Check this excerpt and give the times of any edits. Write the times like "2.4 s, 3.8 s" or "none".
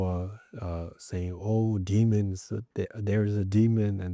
none